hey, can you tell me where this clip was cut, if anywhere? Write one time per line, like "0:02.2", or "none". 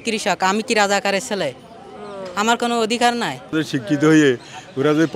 0:03.5